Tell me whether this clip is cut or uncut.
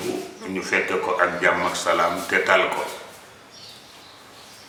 uncut